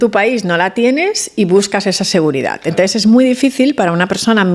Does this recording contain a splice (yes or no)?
no